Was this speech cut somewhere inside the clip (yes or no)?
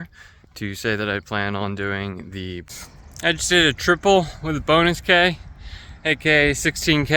yes